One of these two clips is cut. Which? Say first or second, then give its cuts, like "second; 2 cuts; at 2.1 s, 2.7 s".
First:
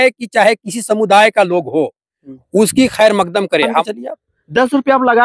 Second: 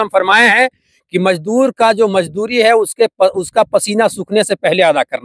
first; 1 cut; at 3.8 s